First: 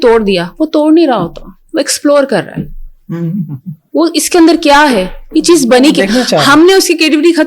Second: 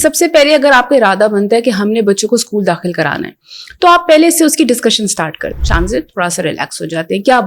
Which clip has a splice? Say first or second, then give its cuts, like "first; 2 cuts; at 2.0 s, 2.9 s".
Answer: second; 1 cut; at 5.5 s